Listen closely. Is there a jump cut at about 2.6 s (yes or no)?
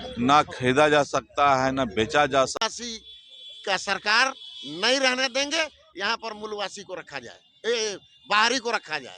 yes